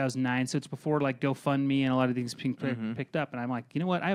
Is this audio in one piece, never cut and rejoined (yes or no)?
yes